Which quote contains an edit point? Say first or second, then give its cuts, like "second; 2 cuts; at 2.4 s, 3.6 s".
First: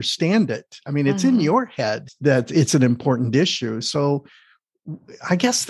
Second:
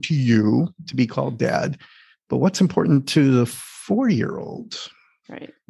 first; 1 cut; at 2.1 s